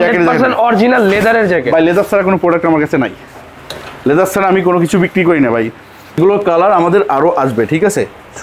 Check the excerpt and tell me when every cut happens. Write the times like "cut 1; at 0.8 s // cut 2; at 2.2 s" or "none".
cut 1; at 6.2 s